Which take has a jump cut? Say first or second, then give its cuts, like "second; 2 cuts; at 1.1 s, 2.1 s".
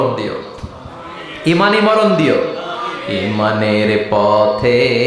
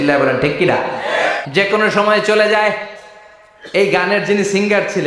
second; 1 cut; at 1.4 s